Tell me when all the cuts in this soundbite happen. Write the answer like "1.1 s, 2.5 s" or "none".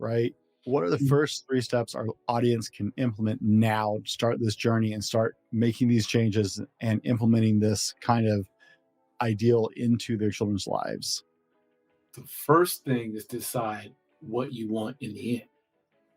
none